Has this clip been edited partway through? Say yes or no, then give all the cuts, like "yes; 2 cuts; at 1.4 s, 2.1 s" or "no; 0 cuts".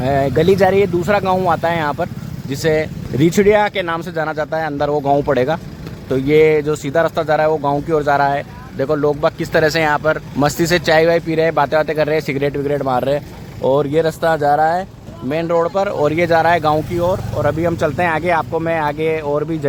no; 0 cuts